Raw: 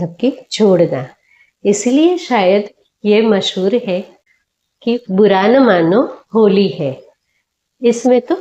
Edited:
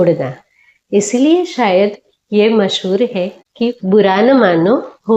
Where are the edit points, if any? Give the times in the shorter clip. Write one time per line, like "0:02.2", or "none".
0:03.4